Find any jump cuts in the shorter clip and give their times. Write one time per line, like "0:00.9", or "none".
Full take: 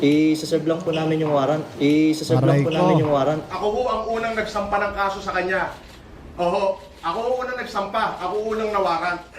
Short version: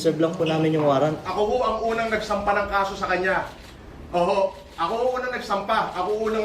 0:01.1